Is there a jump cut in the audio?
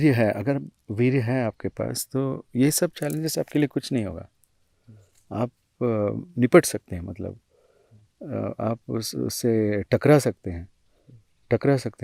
no; 0 cuts

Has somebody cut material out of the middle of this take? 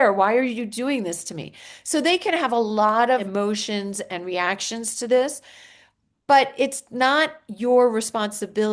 yes; 1 cut; at 3.3 s

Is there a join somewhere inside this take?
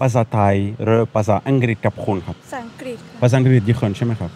no; 0 cuts

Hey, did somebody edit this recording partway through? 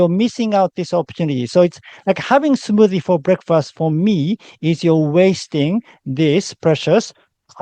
no; 0 cuts

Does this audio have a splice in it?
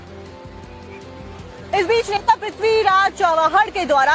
no; 0 cuts

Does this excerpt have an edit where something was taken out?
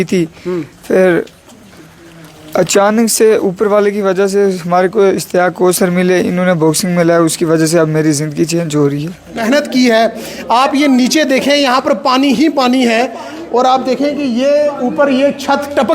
yes; 1 cut; at 9.4 s

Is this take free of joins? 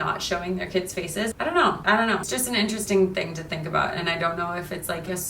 no; 2 cuts; at 1.3 s, 2.3 s

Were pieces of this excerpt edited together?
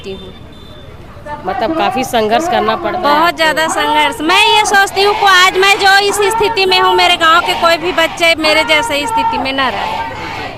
no; 0 cuts

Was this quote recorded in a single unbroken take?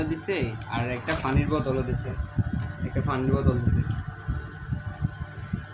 yes; 0 cuts

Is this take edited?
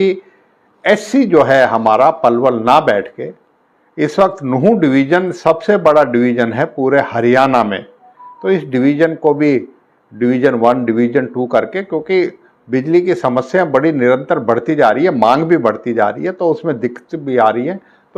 no; 0 cuts

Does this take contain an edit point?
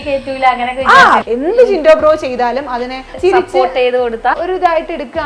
yes; 3 cuts; at 1.2 s, 3.1 s, 4.4 s

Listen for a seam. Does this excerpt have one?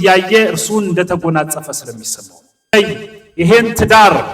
yes; 1 cut; at 2.7 s

